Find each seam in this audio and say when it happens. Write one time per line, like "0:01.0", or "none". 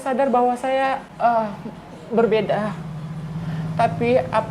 0:01.1